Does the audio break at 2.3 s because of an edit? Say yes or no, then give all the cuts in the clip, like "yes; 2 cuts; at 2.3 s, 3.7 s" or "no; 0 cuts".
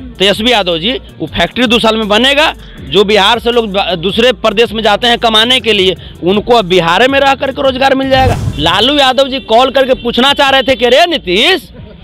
no; 1 cut; at 8.5 s